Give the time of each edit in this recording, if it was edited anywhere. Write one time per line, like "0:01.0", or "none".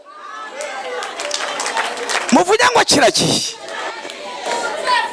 none